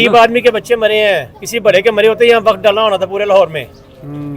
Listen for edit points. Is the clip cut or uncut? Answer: uncut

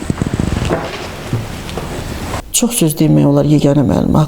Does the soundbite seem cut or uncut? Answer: cut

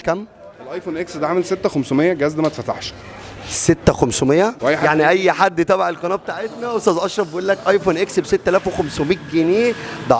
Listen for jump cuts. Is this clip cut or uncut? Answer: cut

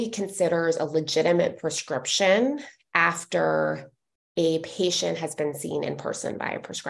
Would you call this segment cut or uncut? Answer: uncut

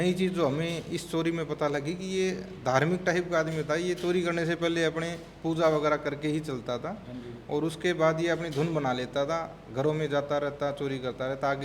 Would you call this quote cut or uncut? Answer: uncut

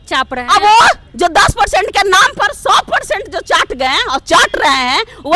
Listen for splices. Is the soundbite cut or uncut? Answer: uncut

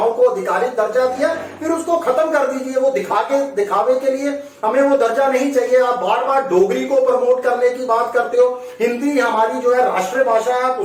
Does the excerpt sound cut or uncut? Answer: uncut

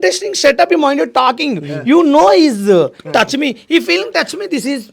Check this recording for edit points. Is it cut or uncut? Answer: uncut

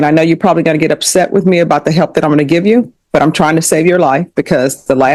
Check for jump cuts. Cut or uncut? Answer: uncut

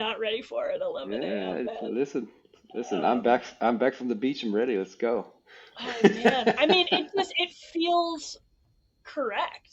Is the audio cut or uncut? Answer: uncut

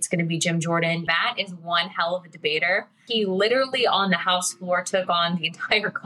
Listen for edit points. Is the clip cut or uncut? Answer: cut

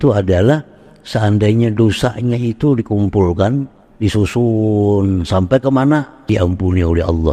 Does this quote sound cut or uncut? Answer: cut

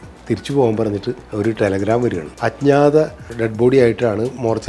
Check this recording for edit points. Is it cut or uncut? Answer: cut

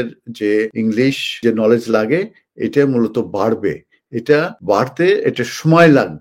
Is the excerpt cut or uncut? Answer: cut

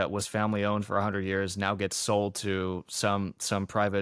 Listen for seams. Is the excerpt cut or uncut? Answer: uncut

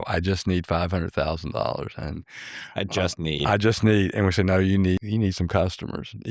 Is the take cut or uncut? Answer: cut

